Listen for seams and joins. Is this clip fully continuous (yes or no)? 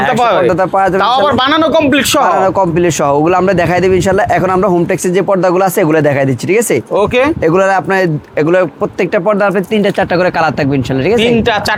yes